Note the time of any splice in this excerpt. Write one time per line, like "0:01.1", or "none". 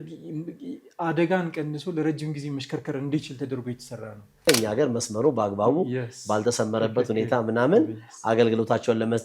0:04.5

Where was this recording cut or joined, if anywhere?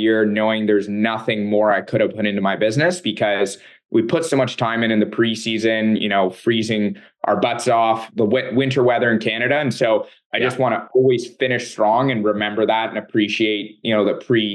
none

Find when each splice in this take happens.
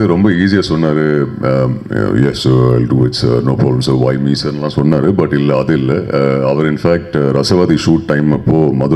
none

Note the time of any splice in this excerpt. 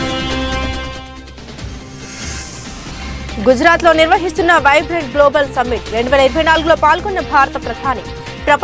none

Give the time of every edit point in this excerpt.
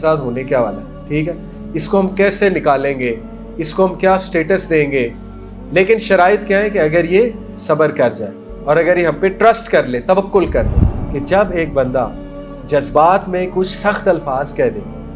0:10.8

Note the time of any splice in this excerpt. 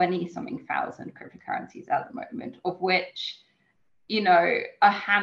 none

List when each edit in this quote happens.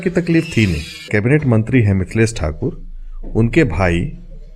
0:01.1

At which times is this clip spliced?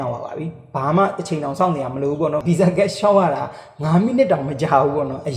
0:02.4

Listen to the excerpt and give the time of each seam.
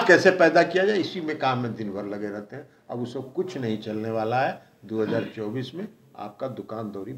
none

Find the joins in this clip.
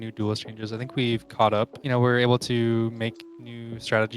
0:01.8

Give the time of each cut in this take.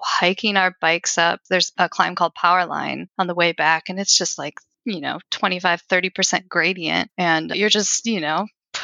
0:01.5
0:03.0
0:04.7
0:07.5

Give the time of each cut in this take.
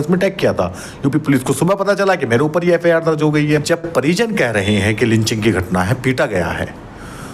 0:03.6

